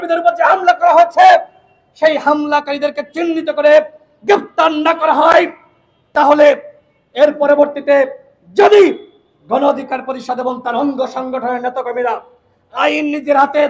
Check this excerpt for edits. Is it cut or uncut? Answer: uncut